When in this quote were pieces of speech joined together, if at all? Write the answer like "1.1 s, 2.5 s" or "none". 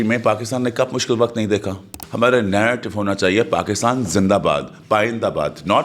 2.0 s

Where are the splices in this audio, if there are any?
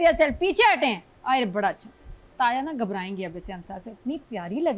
2.2 s

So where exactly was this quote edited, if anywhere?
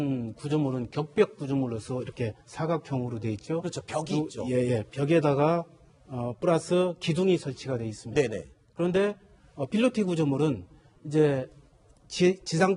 none

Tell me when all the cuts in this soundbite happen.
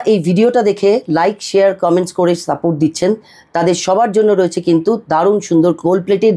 none

